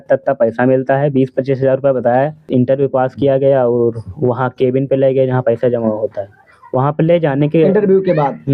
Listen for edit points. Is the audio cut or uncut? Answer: cut